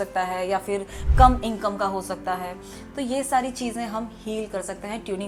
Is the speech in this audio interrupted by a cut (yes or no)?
no